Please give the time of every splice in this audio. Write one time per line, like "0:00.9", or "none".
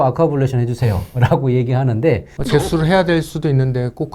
0:02.3